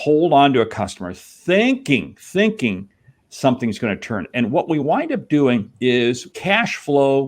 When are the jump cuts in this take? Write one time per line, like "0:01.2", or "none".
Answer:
0:06.1